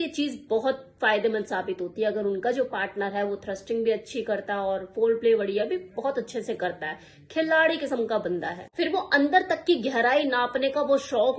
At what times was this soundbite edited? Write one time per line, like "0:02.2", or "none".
0:08.6